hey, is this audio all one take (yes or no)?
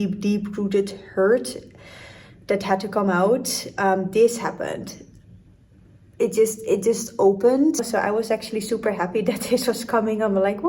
no